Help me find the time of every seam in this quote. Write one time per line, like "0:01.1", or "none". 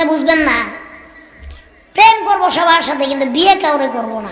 none